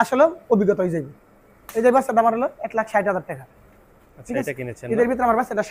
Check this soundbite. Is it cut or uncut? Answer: uncut